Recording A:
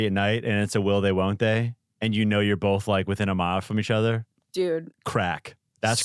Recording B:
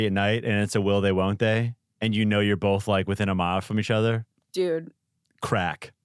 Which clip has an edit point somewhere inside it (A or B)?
A